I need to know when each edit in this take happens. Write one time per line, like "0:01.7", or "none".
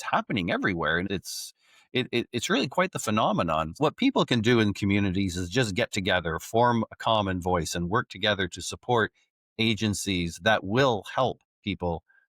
0:01.1
0:03.8